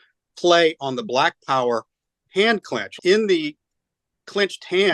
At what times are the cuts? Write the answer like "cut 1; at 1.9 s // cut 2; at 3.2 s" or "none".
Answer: cut 1; at 3.0 s